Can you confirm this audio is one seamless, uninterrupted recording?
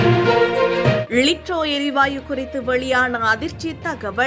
no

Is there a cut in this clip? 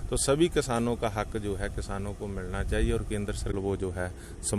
yes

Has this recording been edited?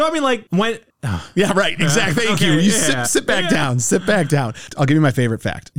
yes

